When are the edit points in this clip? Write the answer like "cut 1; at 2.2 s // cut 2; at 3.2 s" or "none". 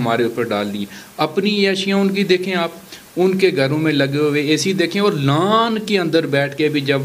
none